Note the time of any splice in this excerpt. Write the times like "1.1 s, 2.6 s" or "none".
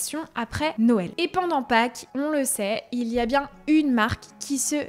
1.1 s